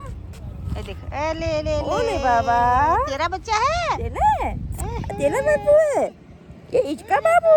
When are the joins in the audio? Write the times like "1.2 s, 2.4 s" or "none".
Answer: none